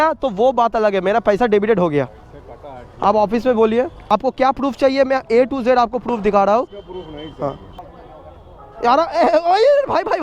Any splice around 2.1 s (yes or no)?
no